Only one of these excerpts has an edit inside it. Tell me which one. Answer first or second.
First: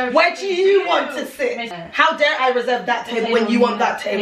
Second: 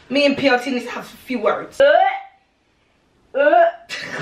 second